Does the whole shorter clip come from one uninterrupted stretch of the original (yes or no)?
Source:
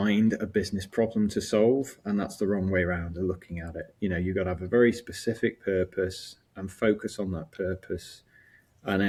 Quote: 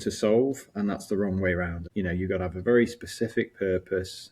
no